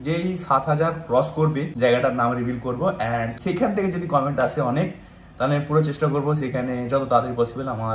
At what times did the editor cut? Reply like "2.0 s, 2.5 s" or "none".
1.7 s, 3.4 s